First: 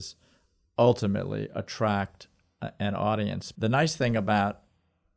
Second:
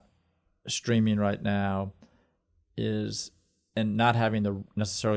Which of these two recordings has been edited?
first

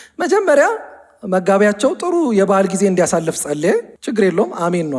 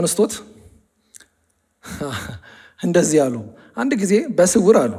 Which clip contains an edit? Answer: first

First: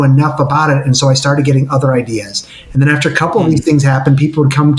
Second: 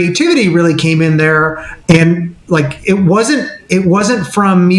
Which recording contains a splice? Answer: second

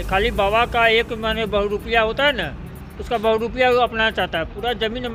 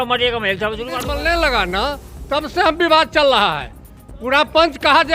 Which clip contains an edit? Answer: second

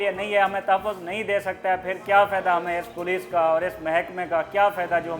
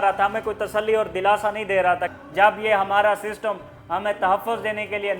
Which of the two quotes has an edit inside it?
second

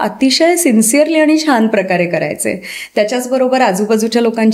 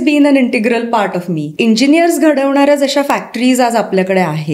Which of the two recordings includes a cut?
second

